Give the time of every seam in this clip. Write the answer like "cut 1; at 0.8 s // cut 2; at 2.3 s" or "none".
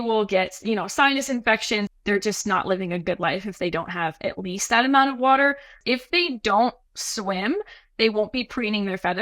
cut 1; at 1.9 s // cut 2; at 5.8 s